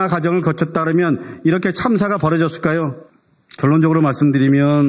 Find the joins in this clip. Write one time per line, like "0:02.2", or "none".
0:03.0